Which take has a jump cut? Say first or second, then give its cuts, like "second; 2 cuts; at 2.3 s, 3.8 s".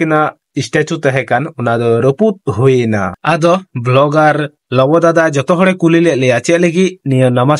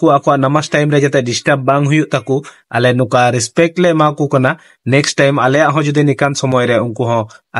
first; 1 cut; at 3.2 s